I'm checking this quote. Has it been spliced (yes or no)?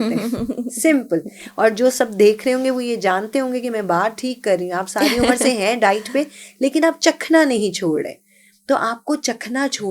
no